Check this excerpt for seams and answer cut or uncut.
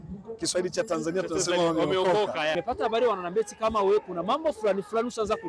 cut